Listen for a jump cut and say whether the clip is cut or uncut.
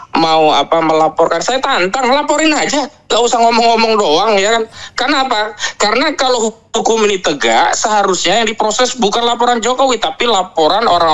uncut